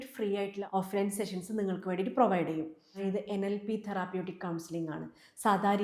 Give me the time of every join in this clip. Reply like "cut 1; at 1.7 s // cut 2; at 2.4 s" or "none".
cut 1; at 3.0 s